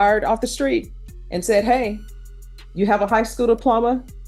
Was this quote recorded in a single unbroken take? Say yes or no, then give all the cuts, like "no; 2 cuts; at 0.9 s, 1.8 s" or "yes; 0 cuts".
yes; 0 cuts